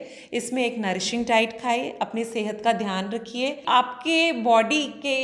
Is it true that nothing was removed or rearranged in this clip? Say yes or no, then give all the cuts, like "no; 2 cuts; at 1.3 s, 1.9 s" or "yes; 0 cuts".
no; 1 cut; at 3.6 s